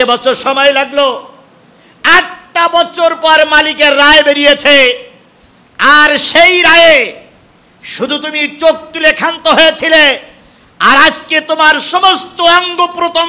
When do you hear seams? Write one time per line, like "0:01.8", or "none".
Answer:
none